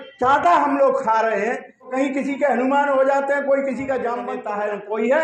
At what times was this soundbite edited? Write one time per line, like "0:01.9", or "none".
0:01.9
0:04.3